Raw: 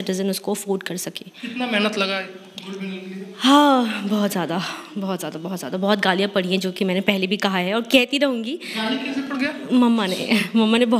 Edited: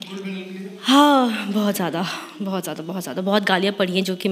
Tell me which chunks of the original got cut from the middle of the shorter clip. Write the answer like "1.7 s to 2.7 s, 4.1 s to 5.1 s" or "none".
none